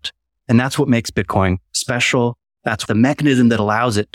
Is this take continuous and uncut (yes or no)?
no